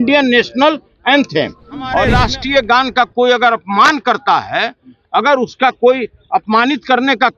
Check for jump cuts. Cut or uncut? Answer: cut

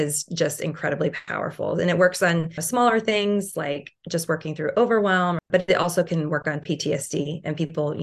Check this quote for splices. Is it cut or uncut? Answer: cut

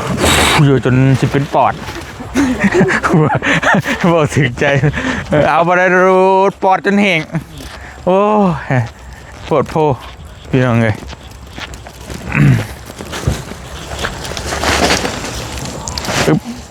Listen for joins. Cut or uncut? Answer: uncut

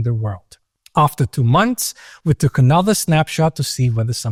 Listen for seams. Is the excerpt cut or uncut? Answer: uncut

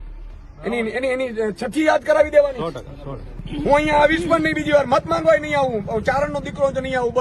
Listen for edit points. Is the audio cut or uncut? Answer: cut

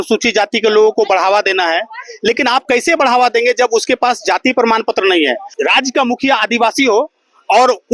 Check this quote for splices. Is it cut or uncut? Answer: cut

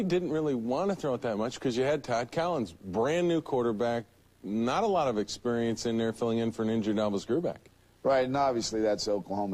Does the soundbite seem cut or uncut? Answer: cut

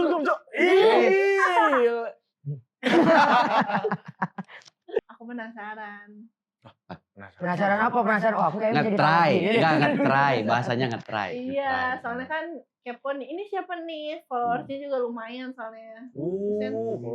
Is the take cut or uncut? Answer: cut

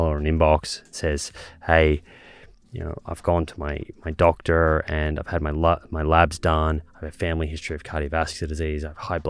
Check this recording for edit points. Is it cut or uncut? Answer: uncut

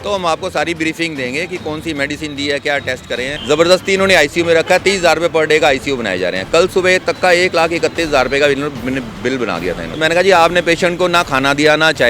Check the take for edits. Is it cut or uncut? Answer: cut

